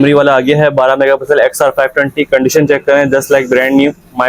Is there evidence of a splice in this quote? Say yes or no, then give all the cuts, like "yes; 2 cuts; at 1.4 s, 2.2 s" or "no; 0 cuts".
no; 0 cuts